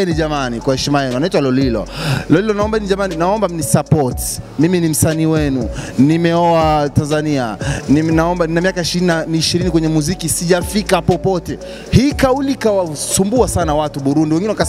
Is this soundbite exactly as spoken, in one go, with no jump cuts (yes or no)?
yes